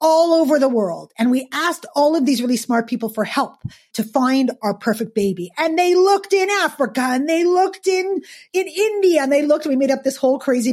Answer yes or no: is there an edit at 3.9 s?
yes